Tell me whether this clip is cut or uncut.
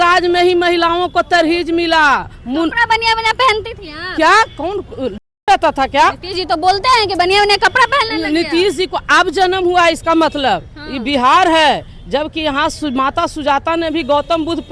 uncut